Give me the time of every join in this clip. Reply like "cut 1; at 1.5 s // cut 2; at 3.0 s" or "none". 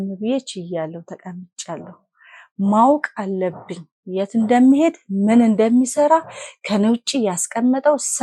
none